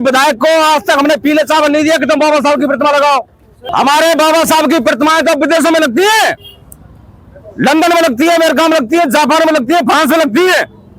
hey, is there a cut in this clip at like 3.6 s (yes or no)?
yes